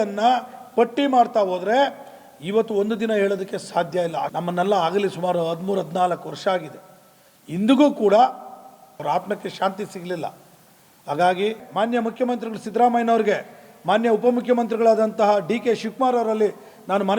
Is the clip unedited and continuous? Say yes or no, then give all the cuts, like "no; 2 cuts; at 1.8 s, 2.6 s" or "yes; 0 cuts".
no; 3 cuts; at 4.3 s, 9.0 s, 11.6 s